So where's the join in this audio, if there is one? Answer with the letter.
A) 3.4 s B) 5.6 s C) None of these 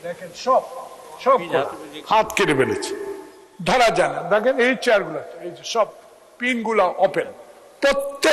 C